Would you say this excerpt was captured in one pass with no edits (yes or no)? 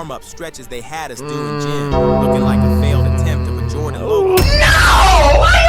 yes